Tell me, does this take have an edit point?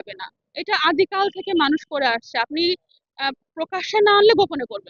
no; 0 cuts

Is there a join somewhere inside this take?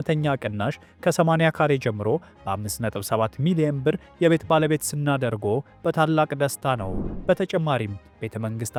no; 0 cuts

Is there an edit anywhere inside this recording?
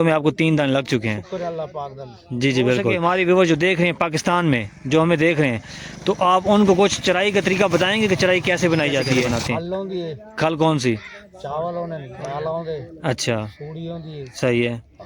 yes; 2 cuts; at 3.0 s, 9.3 s

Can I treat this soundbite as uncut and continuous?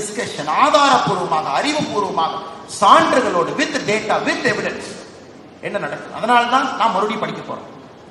yes; 0 cuts

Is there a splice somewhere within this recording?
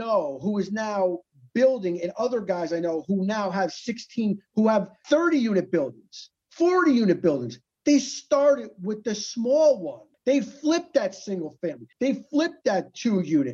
no; 0 cuts

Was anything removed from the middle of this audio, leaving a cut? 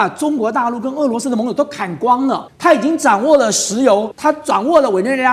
yes; 2 cuts; at 2.5 s, 4.1 s

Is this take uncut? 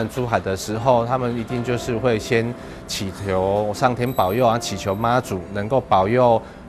yes; 0 cuts

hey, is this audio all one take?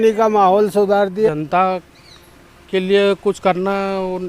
no; 1 cut; at 1.3 s

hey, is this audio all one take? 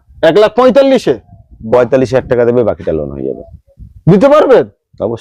yes; 0 cuts

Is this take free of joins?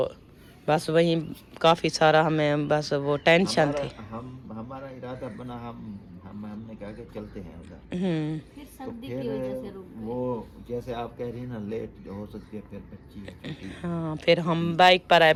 yes; 0 cuts

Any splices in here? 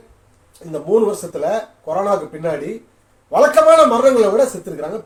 no; 0 cuts

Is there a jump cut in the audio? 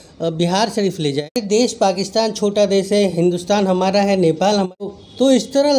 yes; 2 cuts; at 1.3 s, 4.9 s

